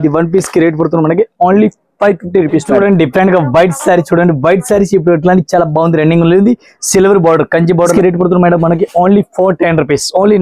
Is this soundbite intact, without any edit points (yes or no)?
no